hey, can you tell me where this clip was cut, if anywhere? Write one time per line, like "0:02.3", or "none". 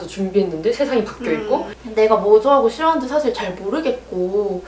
0:01.8